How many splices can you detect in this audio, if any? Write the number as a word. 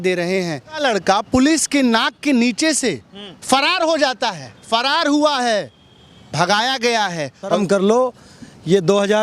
two